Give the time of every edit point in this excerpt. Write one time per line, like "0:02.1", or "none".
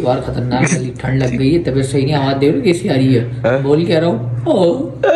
none